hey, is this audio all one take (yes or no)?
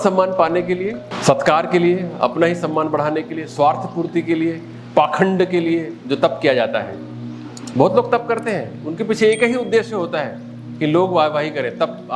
no